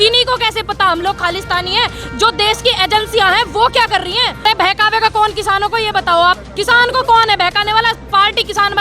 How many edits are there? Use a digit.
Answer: 1